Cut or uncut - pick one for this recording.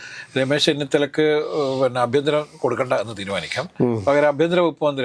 uncut